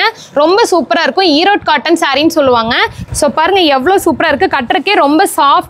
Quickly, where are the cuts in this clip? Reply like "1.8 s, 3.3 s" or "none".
3.0 s